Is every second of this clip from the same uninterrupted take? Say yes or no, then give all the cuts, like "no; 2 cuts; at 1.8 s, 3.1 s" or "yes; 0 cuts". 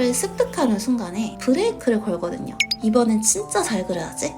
no; 2 cuts; at 1.3 s, 2.7 s